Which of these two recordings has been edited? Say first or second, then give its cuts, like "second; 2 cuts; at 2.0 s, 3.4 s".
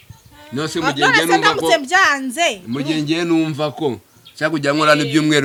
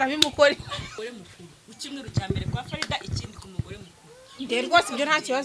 second; 1 cut; at 0.9 s